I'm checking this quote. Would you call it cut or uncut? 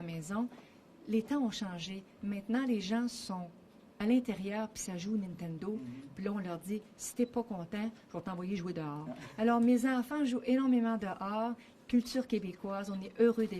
cut